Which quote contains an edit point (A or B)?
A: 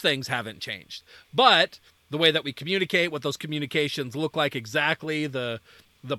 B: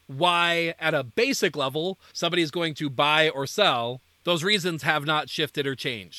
B